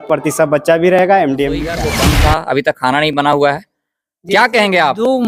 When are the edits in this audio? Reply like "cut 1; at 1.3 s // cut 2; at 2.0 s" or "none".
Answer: cut 1; at 1.9 s